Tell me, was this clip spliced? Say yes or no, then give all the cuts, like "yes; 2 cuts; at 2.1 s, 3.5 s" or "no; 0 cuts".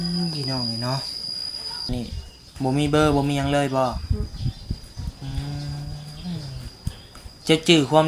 yes; 1 cut; at 1.9 s